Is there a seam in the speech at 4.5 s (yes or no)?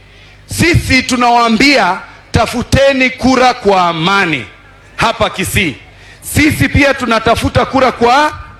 no